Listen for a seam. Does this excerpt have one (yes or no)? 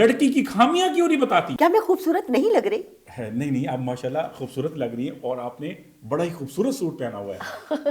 yes